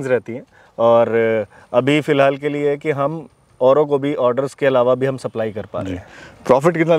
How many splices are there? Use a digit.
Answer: 0